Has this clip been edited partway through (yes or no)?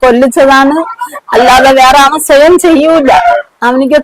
no